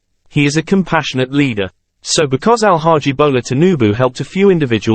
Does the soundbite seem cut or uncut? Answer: cut